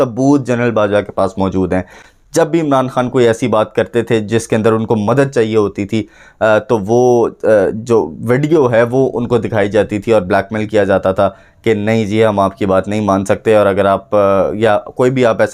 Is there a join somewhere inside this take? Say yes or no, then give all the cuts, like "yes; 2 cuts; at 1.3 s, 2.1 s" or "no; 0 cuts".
no; 0 cuts